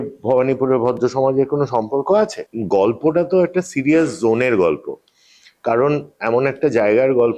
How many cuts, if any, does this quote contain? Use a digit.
1